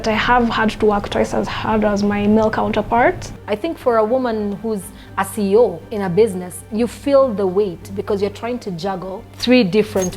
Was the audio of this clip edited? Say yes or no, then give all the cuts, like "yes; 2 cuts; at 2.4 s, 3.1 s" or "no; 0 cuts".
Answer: no; 0 cuts